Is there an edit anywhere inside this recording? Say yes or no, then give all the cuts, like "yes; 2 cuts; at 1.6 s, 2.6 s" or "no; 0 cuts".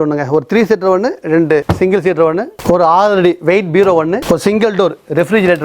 no; 0 cuts